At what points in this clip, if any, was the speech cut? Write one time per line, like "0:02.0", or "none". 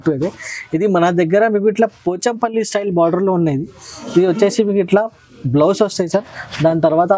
none